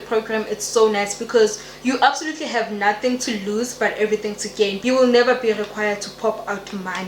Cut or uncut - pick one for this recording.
cut